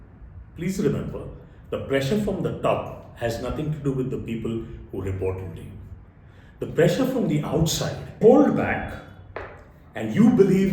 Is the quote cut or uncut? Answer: cut